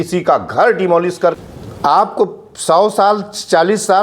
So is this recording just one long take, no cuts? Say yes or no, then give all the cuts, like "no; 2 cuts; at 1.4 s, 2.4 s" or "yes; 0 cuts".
no; 1 cut; at 1.4 s